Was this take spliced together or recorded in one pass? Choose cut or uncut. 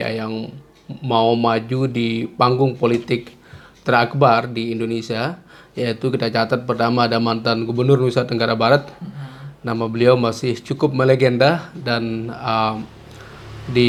uncut